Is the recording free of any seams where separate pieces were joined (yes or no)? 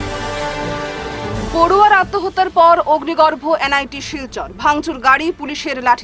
no